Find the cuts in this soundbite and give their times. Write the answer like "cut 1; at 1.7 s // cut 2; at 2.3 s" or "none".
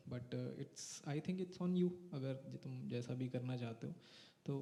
none